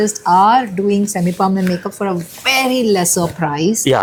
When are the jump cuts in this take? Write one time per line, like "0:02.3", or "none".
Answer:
none

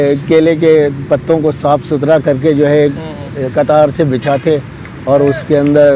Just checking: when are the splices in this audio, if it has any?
none

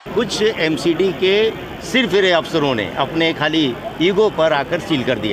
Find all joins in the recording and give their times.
none

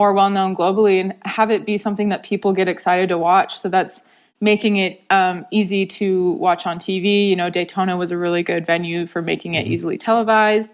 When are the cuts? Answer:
none

